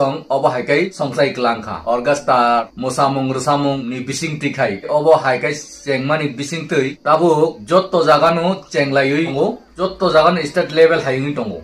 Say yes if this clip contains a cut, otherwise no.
yes